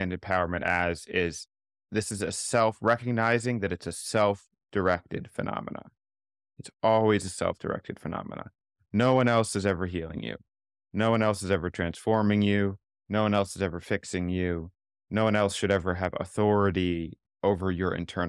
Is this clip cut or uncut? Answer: uncut